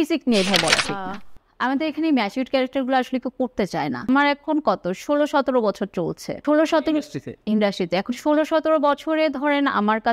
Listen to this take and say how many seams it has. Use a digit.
3